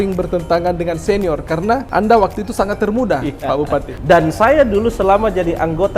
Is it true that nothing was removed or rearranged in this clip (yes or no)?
no